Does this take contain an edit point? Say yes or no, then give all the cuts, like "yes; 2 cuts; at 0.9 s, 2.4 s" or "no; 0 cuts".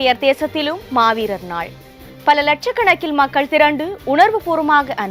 no; 0 cuts